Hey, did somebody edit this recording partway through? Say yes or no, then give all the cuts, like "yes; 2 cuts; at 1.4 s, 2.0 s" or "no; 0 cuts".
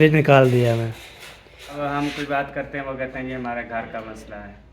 yes; 1 cut; at 1.8 s